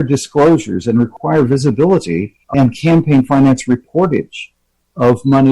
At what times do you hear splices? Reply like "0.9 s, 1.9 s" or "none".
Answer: 1.1 s, 2.3 s